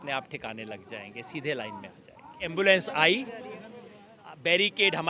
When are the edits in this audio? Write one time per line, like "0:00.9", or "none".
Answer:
0:02.4

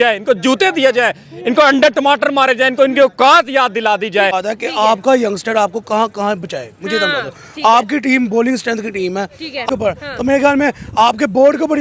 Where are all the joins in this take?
0:04.3
0:09.7

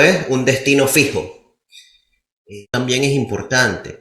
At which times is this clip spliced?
0:02.7

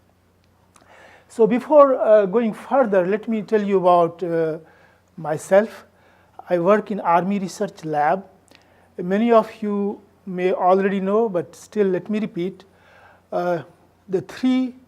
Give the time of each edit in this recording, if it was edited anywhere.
0:02.4

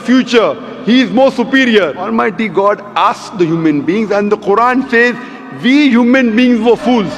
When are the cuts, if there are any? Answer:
0:02.1

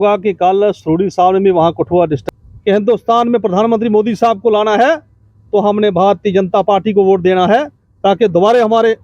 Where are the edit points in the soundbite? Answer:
0:02.2

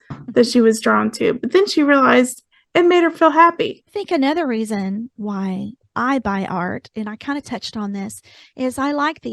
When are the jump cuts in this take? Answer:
0:03.9

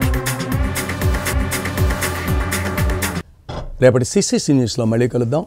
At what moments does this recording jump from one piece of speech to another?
none

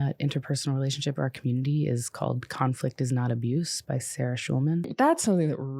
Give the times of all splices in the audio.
0:04.9

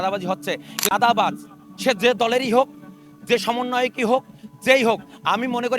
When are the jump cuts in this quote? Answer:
0:00.9

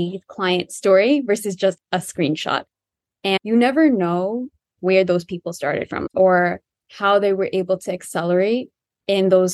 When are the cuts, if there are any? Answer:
0:03.4
0:04.7
0:06.0

